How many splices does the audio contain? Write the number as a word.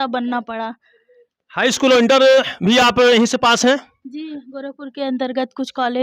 zero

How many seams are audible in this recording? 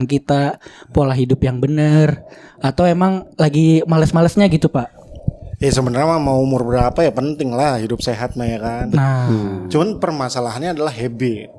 zero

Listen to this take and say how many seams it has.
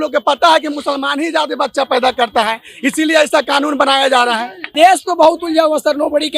one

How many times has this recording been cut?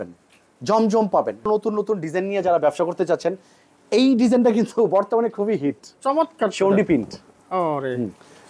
one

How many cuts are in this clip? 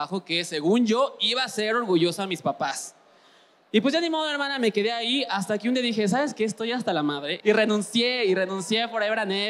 one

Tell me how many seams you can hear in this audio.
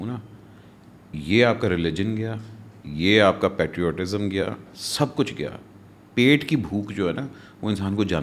zero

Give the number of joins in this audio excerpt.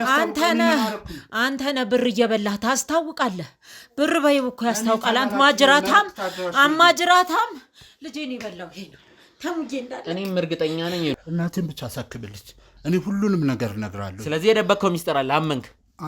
one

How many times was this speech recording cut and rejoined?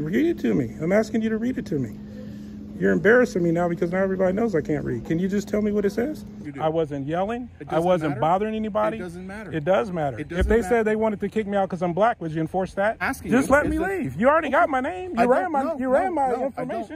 two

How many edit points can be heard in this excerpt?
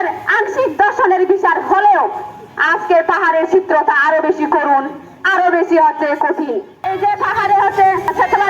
one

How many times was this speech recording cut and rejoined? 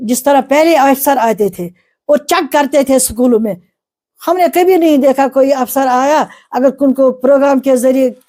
zero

